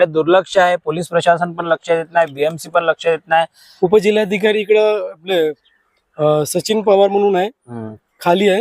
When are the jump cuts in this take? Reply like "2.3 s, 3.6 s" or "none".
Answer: 3.6 s